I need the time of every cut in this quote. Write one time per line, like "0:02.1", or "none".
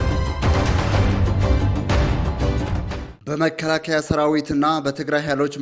none